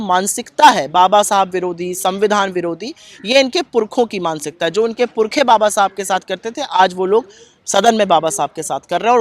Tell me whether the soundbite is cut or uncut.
uncut